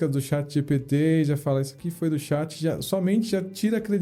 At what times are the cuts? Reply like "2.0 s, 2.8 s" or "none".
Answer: none

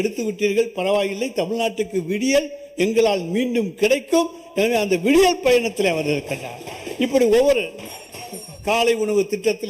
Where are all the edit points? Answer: none

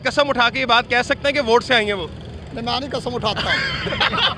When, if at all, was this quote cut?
none

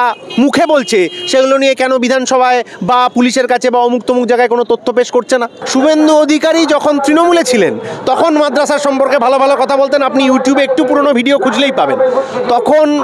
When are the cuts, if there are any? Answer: 5.6 s

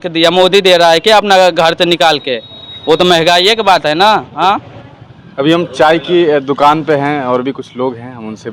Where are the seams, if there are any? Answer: none

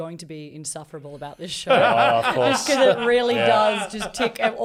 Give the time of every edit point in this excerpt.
none

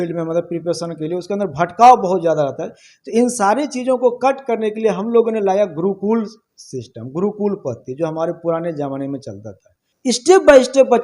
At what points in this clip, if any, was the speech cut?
9.9 s

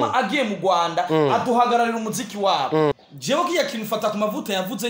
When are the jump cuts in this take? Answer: 2.9 s

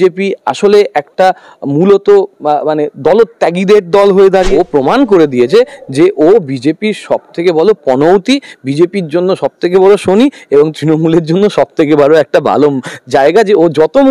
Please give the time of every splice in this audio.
4.5 s

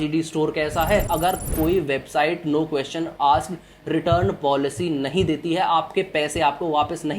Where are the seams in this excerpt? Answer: 1.1 s

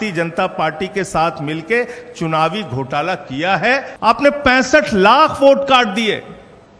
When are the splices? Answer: 3.9 s

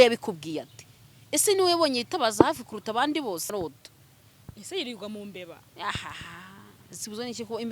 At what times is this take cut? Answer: 3.5 s

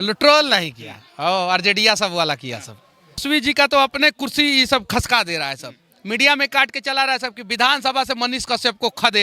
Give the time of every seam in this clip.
3.2 s

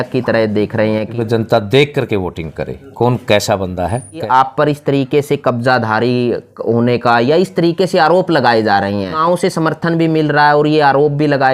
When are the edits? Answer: 1.1 s, 4.2 s, 9.2 s

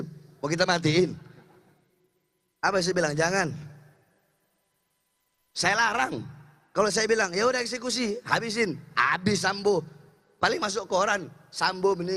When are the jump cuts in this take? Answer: none

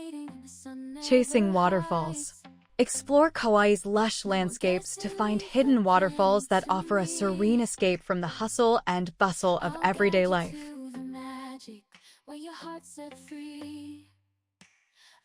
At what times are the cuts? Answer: 1.1 s

